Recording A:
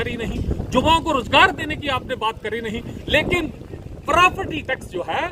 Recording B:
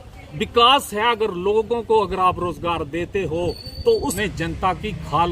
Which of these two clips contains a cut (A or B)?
B